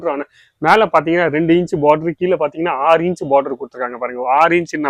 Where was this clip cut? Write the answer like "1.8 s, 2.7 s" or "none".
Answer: none